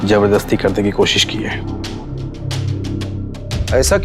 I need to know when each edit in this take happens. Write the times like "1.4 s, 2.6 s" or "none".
none